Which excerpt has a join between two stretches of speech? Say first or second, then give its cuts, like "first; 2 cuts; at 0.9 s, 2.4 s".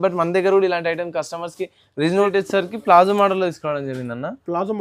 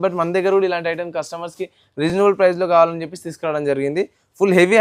first; 1 cut; at 2.1 s